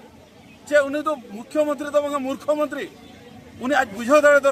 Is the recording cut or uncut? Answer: uncut